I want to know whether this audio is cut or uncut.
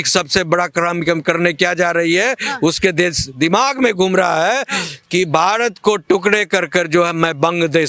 uncut